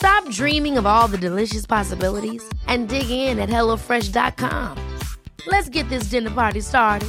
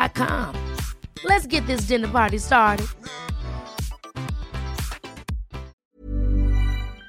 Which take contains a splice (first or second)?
second